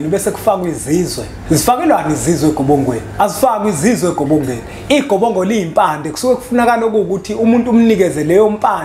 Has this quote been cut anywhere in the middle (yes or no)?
yes